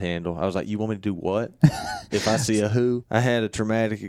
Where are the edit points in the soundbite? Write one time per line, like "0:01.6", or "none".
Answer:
0:03.0